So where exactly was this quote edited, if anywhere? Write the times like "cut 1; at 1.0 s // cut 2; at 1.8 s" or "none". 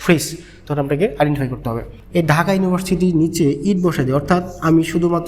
cut 1; at 1.9 s

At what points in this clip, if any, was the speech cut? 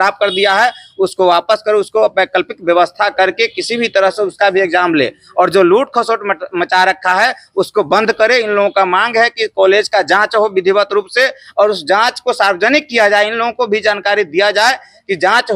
none

